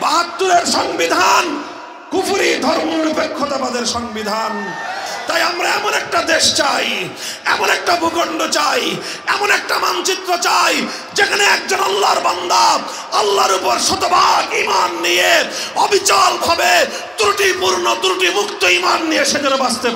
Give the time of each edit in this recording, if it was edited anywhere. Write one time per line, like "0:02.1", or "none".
0:05.1